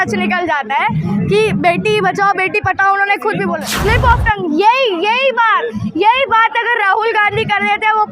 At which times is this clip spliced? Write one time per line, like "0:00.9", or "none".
0:03.7

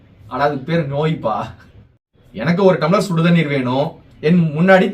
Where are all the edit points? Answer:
0:02.3
0:04.0

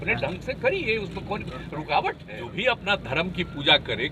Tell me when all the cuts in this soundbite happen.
0:02.5

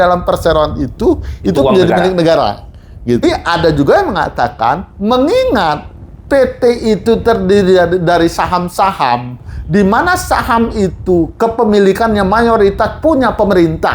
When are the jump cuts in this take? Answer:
0:03.2

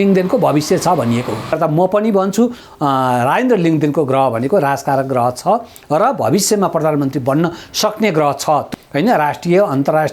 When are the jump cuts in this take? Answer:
0:01.6
0:08.7

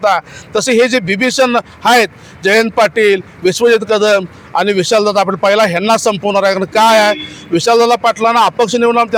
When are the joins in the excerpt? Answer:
none

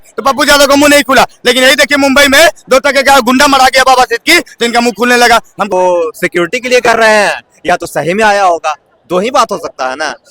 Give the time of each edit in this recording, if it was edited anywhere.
0:05.7

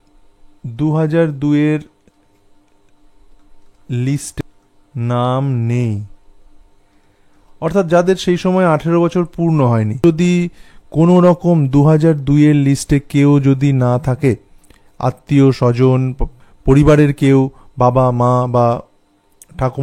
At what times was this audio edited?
0:04.4
0:10.0

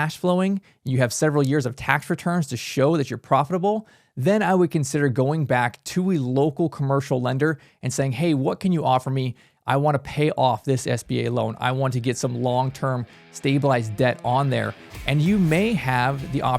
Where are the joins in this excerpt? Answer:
none

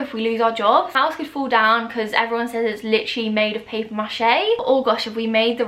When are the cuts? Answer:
0:00.9
0:04.6

